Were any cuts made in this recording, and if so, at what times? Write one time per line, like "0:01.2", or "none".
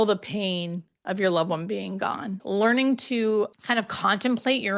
0:02.4
0:03.5